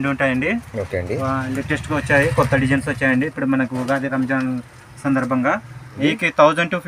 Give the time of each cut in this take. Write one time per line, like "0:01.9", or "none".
0:05.9